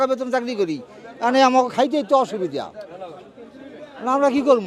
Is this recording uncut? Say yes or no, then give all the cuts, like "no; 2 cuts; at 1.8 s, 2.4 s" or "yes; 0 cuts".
yes; 0 cuts